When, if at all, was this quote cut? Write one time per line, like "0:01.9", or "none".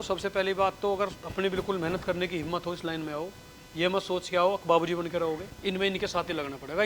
0:01.2
0:05.5